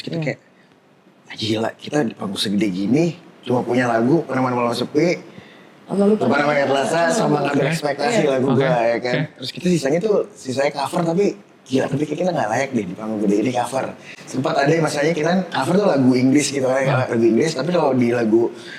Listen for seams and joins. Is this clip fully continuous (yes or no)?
yes